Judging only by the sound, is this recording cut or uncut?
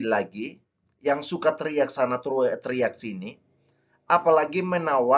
uncut